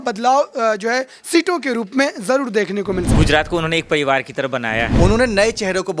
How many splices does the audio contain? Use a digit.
2